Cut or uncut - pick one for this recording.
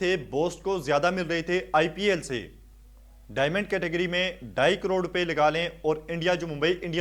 uncut